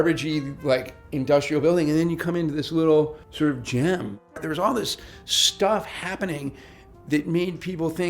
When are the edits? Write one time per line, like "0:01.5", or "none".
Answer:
0:03.2
0:04.4